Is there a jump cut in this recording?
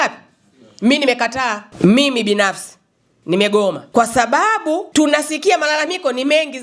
yes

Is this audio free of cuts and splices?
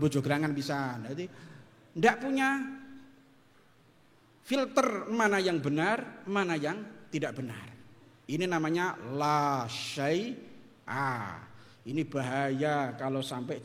yes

